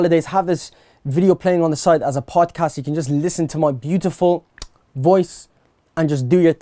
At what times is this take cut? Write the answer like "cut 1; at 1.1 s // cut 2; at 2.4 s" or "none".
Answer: none